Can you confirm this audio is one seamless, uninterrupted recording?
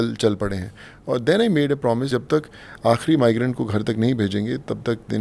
no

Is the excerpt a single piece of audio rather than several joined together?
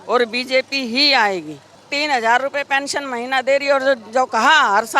no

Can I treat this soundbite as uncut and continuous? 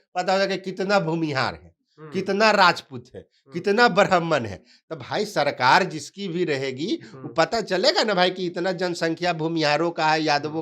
yes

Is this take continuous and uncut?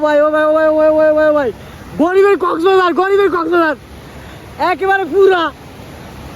yes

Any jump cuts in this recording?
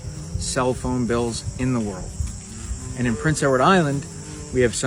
no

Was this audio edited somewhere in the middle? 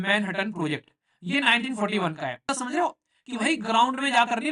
yes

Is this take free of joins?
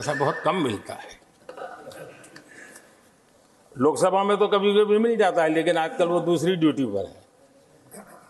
yes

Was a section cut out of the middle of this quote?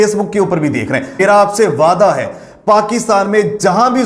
yes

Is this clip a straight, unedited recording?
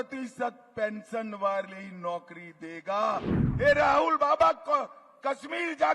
no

